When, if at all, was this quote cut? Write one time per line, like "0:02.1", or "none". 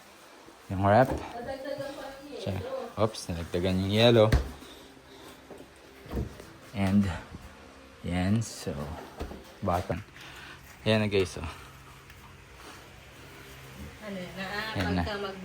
0:09.9